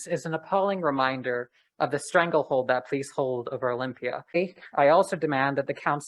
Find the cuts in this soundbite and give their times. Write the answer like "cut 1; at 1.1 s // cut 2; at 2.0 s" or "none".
cut 1; at 4.4 s